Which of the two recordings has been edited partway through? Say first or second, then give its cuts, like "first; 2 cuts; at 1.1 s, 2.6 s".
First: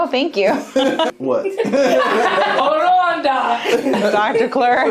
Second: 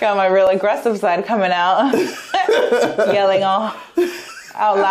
first; 3 cuts; at 1.1 s, 2.6 s, 4.0 s